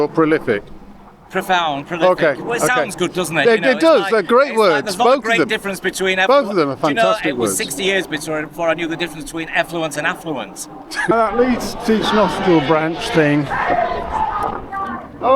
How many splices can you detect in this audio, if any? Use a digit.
1